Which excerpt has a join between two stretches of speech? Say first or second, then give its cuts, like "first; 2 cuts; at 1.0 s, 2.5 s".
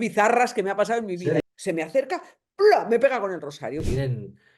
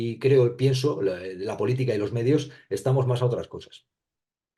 first; 2 cuts; at 1.4 s, 3.8 s